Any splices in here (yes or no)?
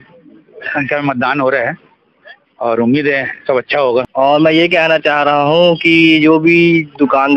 yes